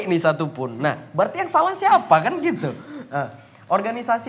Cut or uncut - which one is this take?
uncut